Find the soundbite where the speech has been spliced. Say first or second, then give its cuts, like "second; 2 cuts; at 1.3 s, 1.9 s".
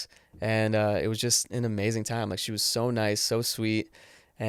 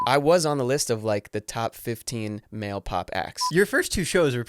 second; 1 cut; at 3.4 s